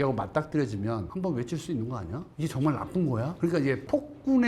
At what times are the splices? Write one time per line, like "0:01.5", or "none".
0:01.1

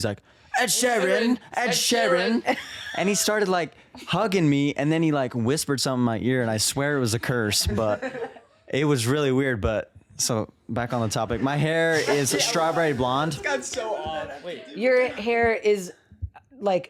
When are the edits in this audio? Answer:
none

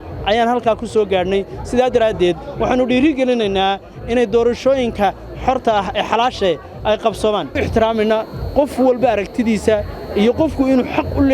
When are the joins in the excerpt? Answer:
0:07.6

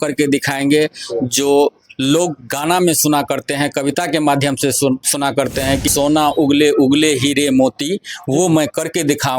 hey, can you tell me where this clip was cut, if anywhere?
0:05.9

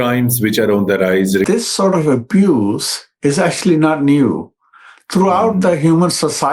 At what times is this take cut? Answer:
0:01.5

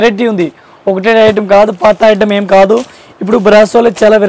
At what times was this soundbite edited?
none

